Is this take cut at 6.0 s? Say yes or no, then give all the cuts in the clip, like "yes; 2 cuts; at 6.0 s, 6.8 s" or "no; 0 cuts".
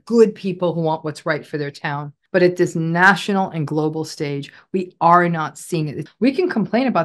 yes; 2 cuts; at 2.1 s, 6.0 s